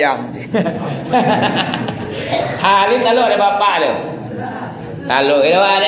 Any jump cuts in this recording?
no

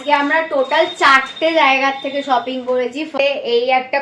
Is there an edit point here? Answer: yes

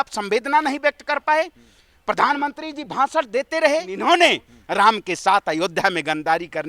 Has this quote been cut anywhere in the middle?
yes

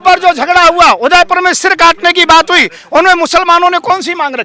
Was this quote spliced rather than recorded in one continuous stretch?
no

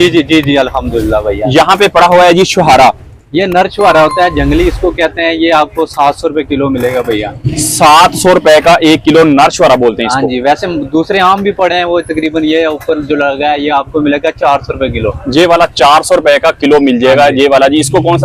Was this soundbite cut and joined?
no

